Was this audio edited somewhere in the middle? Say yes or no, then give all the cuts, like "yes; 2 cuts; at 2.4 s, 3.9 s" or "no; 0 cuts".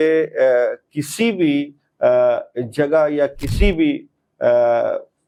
no; 0 cuts